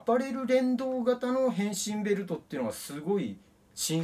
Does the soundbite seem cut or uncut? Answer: uncut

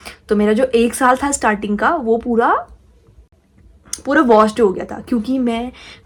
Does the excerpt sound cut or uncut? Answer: uncut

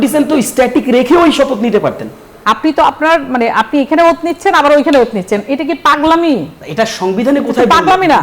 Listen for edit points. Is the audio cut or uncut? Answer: cut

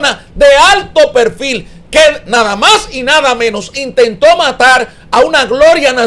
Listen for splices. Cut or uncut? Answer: uncut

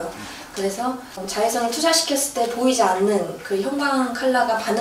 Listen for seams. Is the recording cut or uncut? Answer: cut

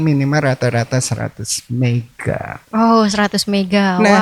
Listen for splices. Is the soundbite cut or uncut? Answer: uncut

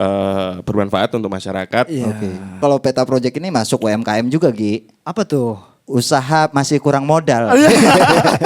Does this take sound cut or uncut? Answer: cut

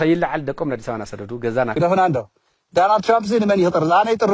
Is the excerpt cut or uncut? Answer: cut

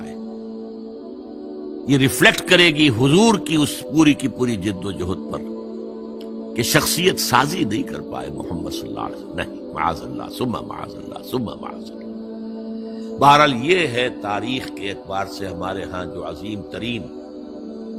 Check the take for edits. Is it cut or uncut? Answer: uncut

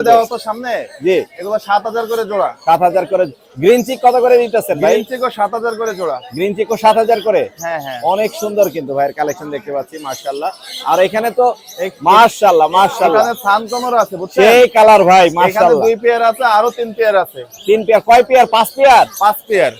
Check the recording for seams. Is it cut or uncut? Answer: uncut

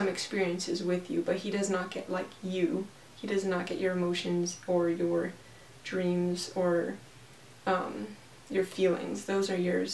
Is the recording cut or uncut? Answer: uncut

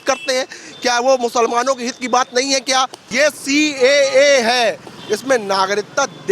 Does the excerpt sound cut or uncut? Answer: cut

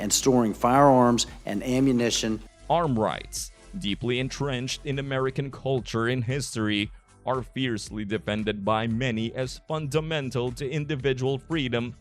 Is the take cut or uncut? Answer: uncut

